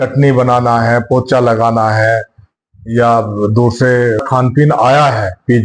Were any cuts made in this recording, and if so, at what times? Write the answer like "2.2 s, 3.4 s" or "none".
4.2 s